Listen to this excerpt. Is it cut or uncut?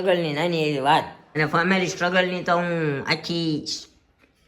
cut